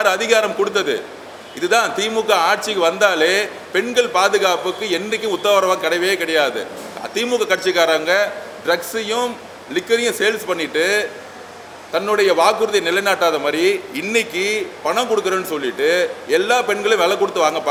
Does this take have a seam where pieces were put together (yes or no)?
no